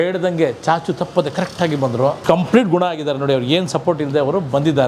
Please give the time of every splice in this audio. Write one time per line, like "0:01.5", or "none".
0:02.2